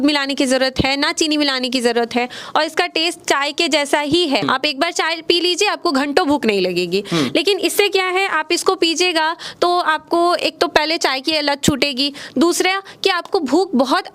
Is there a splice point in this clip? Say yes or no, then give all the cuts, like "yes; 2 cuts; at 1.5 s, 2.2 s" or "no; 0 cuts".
yes; 1 cut; at 4.4 s